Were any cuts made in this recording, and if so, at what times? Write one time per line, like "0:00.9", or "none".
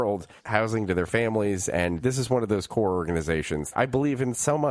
0:02.0
0:03.7

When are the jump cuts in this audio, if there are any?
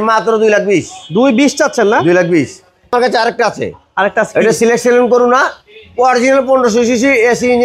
none

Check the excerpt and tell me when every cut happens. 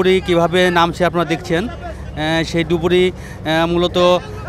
none

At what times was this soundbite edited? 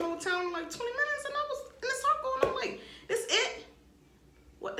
none

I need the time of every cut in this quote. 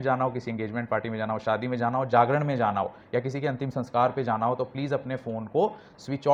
none

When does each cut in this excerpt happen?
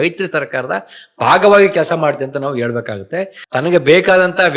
0:03.4

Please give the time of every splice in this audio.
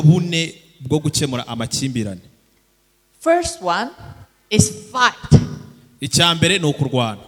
none

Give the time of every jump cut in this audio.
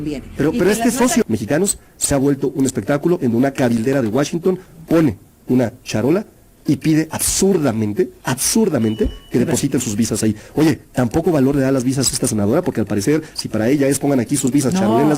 0:01.2

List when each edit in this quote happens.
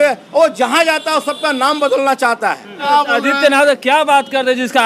0:02.8

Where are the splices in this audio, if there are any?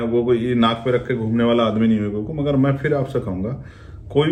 none

